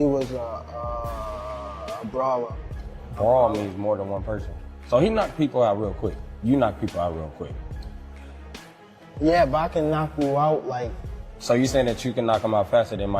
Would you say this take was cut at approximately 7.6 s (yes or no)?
yes